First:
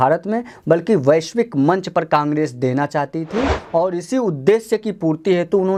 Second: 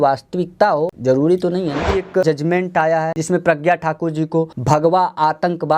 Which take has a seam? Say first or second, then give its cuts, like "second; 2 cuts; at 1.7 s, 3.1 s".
second; 4 cuts; at 1.0 s, 2.2 s, 3.2 s, 4.5 s